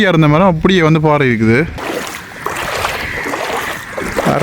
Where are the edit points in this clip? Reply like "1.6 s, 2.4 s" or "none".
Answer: 1.8 s